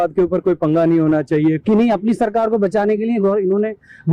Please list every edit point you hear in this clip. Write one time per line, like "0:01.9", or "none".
0:01.6